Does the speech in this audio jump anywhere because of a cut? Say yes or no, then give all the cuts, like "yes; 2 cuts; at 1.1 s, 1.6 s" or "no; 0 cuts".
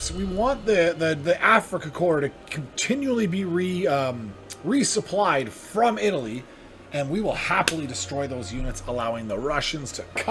no; 0 cuts